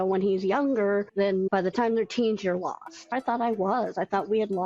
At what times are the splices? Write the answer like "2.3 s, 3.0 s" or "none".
1.5 s, 3.1 s